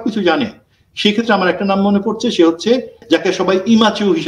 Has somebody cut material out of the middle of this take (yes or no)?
yes